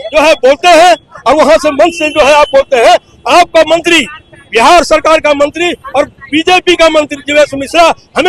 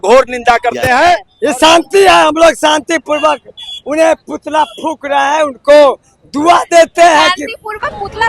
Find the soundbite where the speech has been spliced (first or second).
second